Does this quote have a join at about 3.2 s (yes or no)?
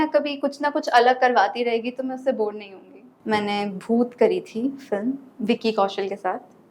yes